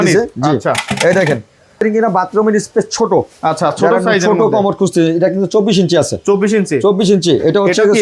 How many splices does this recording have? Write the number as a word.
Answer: one